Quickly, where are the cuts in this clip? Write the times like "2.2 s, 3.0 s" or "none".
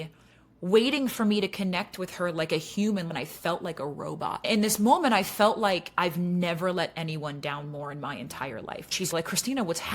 3.1 s, 4.5 s, 9.1 s